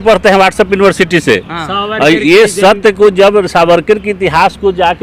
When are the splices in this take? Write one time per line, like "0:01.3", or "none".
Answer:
none